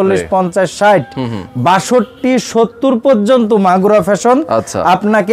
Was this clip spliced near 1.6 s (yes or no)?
no